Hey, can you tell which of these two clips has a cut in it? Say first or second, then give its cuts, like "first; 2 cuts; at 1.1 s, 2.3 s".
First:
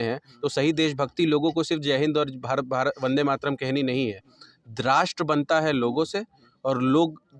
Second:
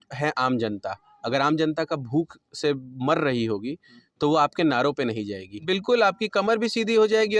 second; 1 cut; at 5.5 s